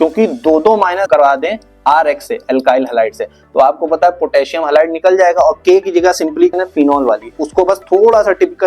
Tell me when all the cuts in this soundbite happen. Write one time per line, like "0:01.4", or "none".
0:01.1
0:06.5

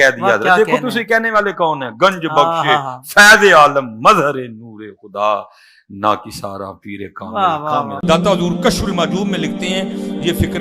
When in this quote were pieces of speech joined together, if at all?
0:07.9

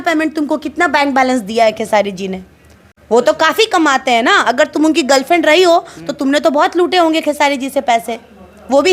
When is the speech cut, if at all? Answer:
none

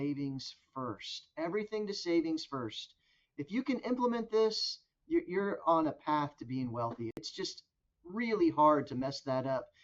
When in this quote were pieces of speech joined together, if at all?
0:07.2

